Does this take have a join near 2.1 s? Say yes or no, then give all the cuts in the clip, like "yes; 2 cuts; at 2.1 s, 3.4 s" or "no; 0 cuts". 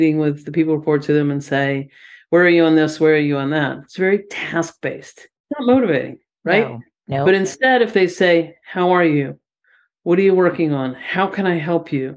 no; 1 cut; at 5.3 s